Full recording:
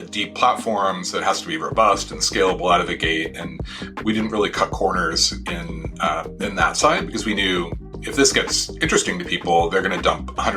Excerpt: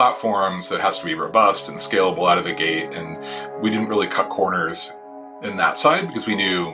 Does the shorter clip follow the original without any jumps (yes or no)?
no